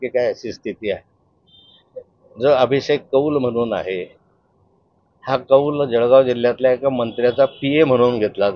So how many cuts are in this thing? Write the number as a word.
zero